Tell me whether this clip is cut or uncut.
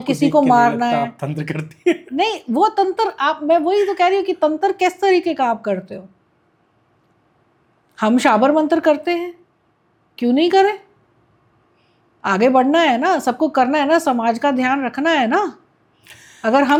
uncut